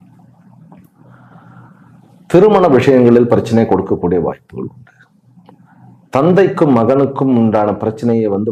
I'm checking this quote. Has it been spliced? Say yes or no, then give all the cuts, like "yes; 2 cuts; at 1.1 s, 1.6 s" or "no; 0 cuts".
no; 0 cuts